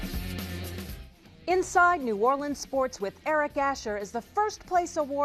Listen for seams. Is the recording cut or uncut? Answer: cut